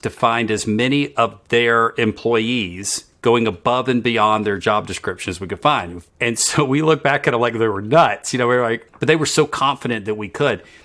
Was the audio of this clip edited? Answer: yes; 2 cuts; at 6.0 s, 8.8 s

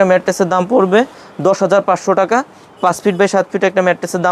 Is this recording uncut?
yes; 0 cuts

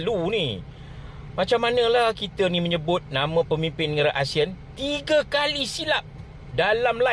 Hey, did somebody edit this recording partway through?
no; 0 cuts

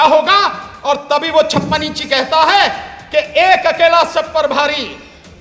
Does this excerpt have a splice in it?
no; 0 cuts

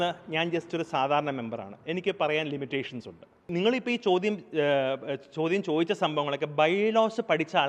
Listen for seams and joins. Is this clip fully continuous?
no; 1 cut; at 3.5 s

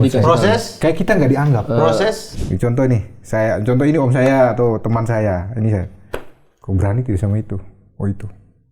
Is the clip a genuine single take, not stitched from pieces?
no; 1 cut; at 2.3 s

